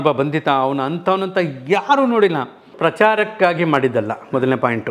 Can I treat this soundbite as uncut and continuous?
no; 1 cut; at 2.7 s

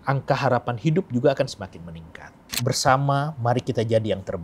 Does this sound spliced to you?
yes; 1 cut; at 2.5 s

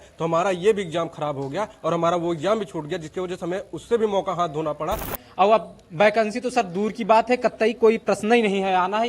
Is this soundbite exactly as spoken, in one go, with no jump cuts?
no; 1 cut; at 5.2 s

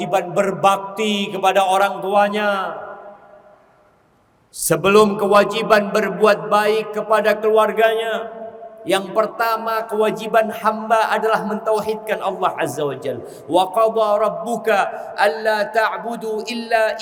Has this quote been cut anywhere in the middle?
no; 0 cuts

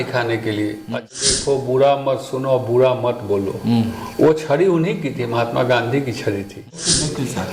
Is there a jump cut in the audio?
yes; 2 cuts; at 1.1 s, 6.6 s

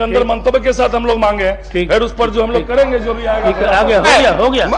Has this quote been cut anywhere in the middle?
no; 0 cuts

